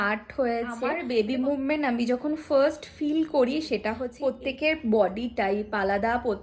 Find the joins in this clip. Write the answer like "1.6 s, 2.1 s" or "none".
1.0 s, 4.1 s